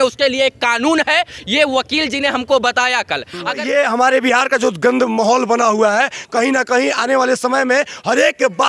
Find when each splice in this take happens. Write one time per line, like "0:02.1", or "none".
0:03.6